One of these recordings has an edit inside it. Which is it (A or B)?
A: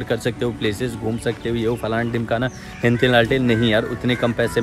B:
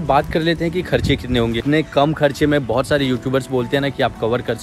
B